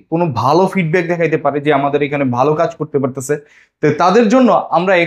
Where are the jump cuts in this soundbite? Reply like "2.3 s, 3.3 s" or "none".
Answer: none

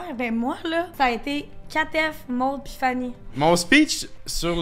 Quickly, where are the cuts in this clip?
0.9 s, 3.3 s

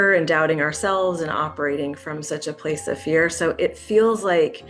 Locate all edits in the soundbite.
none

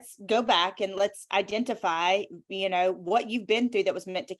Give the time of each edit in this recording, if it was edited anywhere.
none

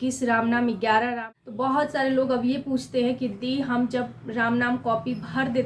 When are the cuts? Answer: 1.2 s

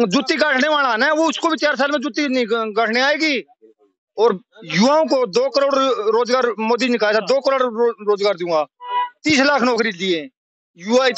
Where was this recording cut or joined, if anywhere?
none

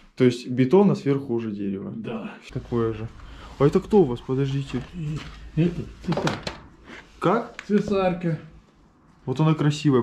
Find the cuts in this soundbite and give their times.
2.4 s

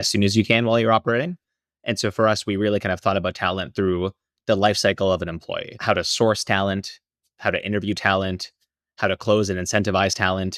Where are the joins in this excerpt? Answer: 5.7 s

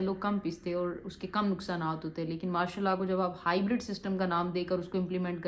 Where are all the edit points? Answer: none

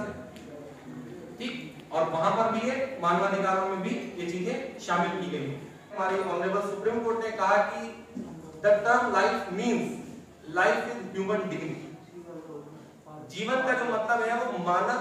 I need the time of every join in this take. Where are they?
6.0 s

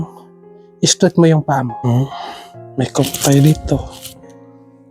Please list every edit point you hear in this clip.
1.7 s

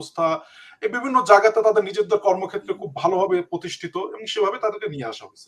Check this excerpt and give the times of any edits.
none

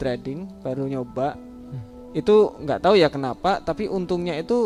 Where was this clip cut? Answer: none

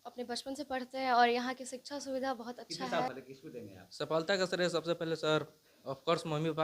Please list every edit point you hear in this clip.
3.1 s

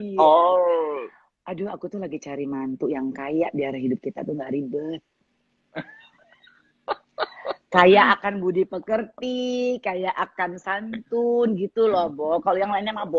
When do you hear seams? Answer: none

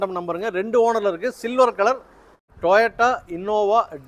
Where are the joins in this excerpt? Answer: 2.5 s

